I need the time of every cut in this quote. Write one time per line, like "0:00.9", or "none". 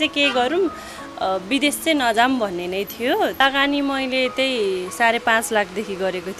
0:03.4